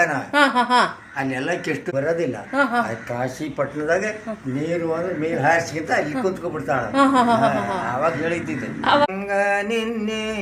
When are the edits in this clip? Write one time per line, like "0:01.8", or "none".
0:01.8
0:09.1